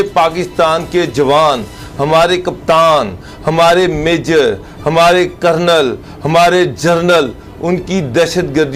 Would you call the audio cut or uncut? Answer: uncut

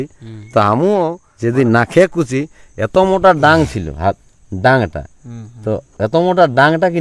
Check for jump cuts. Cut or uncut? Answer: cut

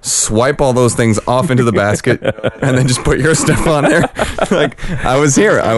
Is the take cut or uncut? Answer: cut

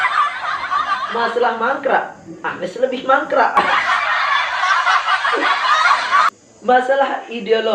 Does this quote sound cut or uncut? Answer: cut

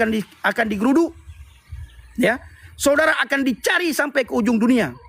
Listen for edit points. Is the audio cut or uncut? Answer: uncut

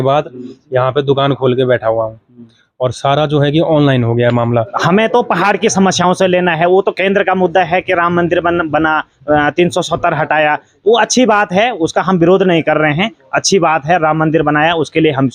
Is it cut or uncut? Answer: cut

